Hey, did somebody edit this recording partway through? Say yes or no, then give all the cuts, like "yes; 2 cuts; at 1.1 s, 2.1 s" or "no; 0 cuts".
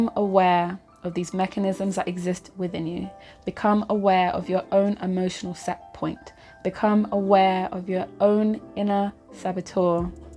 no; 0 cuts